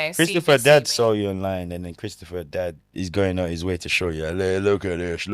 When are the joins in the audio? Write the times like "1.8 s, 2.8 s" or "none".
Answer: 2.8 s